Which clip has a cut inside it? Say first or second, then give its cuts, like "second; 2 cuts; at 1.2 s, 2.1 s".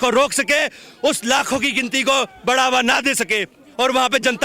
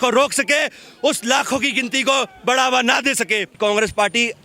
second; 1 cut; at 3.5 s